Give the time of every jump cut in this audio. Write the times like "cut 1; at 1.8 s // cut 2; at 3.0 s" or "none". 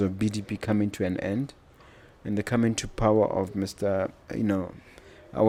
none